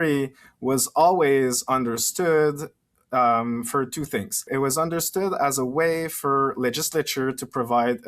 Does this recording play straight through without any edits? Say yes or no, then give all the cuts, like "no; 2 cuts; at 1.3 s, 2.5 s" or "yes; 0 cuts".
no; 1 cut; at 4.5 s